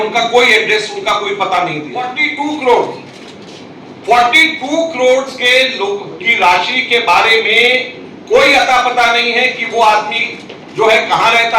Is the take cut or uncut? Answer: cut